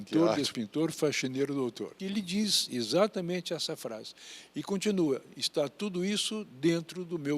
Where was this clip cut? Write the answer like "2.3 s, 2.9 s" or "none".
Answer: 2.0 s